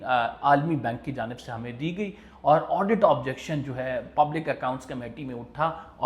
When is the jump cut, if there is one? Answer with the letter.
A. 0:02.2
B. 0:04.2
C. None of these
C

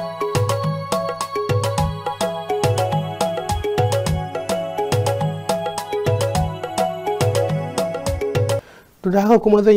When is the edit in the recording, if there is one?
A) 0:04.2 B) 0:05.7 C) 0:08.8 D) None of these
D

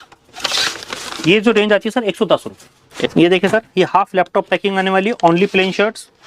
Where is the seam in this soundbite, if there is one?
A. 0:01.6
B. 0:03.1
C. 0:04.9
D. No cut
B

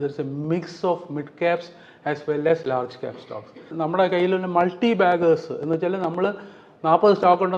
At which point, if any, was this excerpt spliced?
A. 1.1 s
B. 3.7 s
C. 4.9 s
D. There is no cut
B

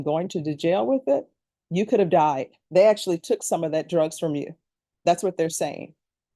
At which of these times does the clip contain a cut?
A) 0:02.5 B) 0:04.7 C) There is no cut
A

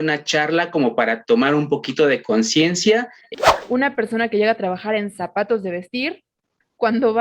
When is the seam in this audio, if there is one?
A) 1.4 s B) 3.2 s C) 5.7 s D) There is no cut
B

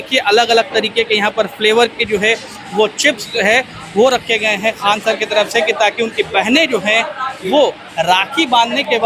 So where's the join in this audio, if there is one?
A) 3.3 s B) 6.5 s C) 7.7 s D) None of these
D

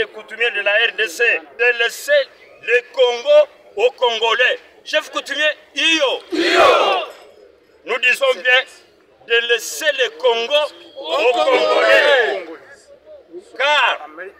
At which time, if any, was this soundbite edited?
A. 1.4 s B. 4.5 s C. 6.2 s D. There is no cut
A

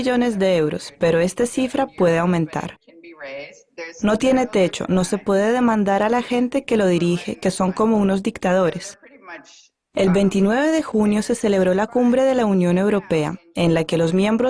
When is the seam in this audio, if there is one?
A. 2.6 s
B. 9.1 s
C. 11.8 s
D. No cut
B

